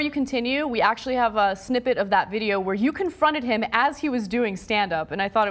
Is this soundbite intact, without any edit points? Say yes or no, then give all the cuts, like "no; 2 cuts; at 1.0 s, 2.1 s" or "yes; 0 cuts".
yes; 0 cuts